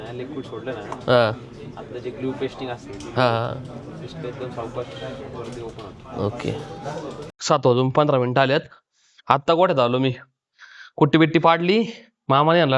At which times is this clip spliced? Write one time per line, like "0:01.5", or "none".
0:07.3

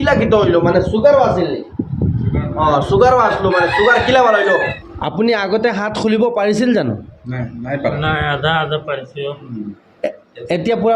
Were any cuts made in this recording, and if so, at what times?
0:04.8

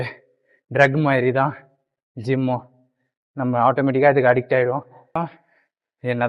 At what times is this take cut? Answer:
0:05.2

